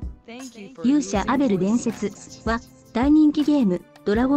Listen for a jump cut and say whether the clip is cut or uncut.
cut